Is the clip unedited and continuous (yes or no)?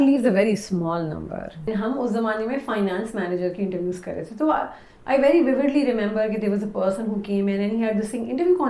no